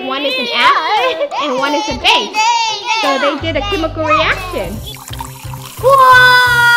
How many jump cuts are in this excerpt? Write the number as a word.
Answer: one